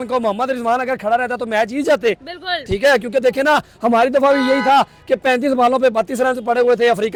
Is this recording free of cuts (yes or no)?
yes